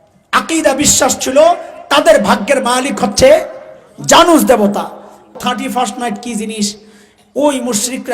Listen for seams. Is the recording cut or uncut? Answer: cut